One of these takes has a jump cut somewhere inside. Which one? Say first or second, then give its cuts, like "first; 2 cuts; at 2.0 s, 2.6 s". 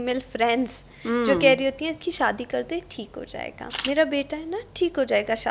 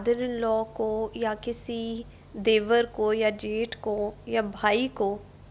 first; 1 cut; at 3.6 s